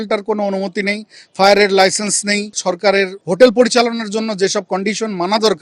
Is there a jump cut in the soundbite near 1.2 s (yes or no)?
no